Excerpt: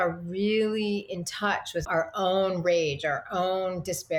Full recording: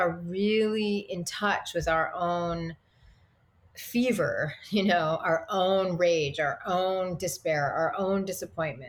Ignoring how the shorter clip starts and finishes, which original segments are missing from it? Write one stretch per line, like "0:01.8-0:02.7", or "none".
0:01.8-0:05.2